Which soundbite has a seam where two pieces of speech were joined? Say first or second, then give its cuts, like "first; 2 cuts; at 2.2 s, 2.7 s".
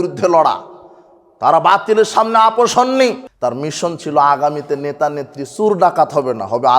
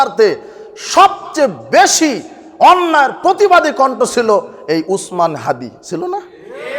first; 1 cut; at 3.3 s